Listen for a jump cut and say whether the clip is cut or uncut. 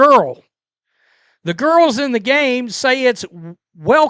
cut